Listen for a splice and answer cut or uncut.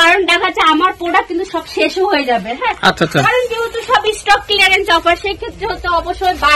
uncut